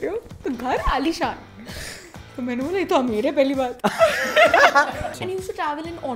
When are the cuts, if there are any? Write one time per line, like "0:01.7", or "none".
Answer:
0:05.2